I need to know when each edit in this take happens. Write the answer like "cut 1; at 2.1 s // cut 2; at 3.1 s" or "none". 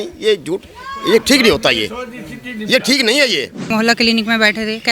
cut 1; at 3.7 s